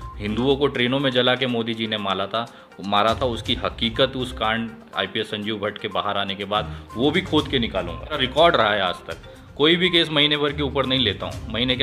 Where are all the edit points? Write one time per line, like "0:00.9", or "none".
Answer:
0:08.2